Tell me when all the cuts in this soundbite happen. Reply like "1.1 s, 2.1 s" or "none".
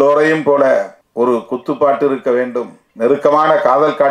1.0 s, 2.8 s